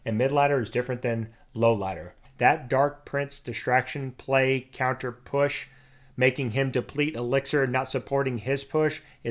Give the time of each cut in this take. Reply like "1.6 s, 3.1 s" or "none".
2.2 s